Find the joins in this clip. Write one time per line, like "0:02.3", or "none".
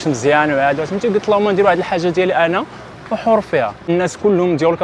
0:03.8